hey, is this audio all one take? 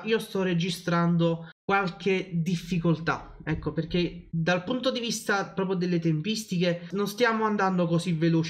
no; 3 cuts; at 1.5 s, 4.2 s, 6.9 s

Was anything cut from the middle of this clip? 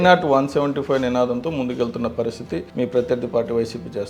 yes; 1 cut; at 2.7 s

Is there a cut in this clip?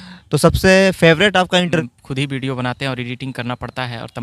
yes; 1 cut; at 1.8 s

